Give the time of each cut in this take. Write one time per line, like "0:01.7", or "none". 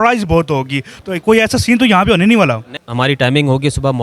0:02.7